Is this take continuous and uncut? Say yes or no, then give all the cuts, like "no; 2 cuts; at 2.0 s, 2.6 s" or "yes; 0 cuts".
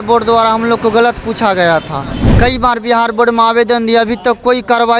no; 1 cut; at 2.2 s